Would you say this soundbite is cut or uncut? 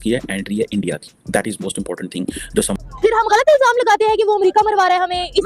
cut